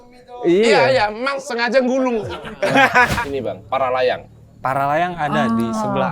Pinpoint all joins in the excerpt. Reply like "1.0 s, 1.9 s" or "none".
1.4 s, 2.5 s, 3.2 s